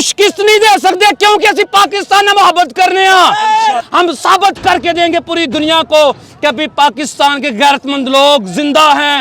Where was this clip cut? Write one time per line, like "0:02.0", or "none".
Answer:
0:03.8